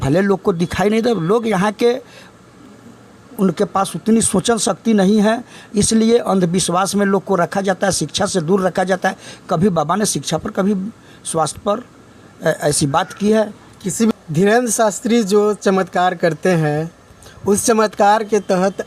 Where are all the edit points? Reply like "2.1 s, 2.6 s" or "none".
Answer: 14.1 s